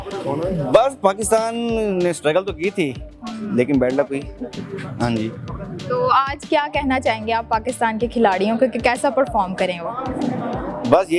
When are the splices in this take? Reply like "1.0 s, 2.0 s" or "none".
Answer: none